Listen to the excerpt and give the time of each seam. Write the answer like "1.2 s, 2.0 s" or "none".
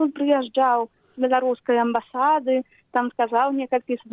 none